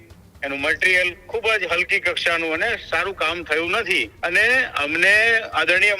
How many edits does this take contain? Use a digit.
1